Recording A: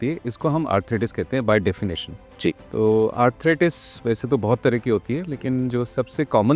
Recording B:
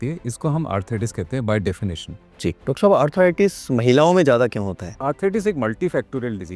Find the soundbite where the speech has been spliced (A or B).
B